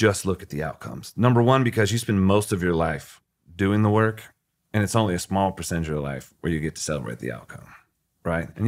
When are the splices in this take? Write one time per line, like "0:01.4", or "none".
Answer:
none